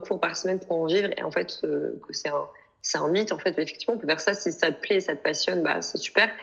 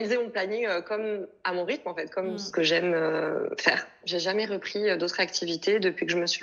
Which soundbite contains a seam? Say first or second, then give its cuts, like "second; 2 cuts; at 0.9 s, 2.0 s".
second; 2 cuts; at 2.4 s, 4.0 s